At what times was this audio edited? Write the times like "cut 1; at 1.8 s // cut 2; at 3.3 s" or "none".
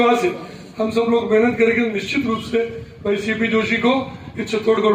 none